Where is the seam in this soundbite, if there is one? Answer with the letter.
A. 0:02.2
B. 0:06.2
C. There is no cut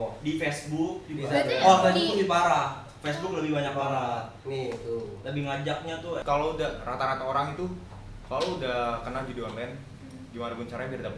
B